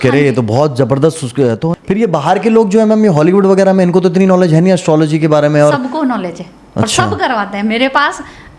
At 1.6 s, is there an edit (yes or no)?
yes